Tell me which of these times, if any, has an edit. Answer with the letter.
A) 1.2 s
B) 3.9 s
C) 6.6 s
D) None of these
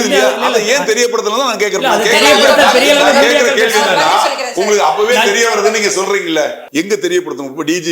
C